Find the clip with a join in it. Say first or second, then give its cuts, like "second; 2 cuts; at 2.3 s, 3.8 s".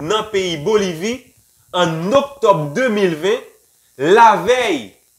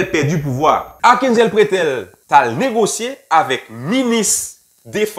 second; 2 cuts; at 0.9 s, 2.1 s